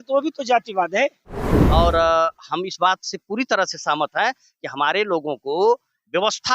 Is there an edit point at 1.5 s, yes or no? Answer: yes